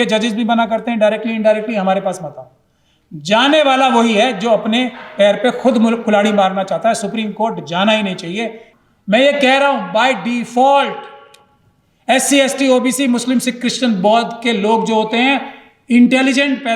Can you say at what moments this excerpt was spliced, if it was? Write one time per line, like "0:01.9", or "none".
0:08.6